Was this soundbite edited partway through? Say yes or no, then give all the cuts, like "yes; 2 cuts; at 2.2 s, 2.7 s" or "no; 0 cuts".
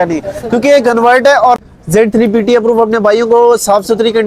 yes; 1 cut; at 1.7 s